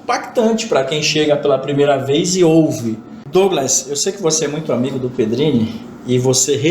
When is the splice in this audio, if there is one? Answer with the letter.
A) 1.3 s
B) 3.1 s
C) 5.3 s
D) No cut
B